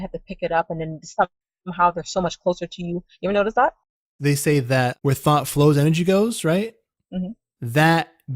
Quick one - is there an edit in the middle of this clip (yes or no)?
yes